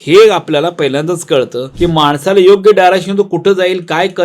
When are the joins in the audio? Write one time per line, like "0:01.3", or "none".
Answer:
0:01.6